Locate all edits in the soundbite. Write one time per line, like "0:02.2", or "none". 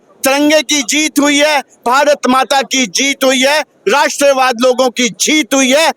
none